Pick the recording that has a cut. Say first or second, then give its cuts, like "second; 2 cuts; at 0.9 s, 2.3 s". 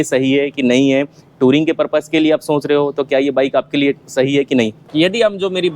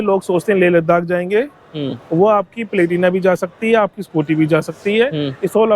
first; 1 cut; at 4.8 s